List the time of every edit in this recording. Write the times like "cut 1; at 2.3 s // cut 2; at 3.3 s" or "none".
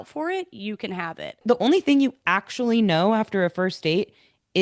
cut 1; at 1.4 s